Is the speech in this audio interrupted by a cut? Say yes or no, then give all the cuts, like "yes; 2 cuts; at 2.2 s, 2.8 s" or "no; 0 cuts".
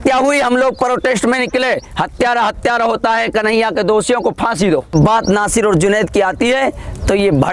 yes; 1 cut; at 4.9 s